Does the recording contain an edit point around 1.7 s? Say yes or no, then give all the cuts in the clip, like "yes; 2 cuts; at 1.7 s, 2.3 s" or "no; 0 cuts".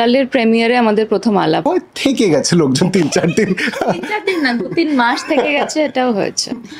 yes; 1 cut; at 1.7 s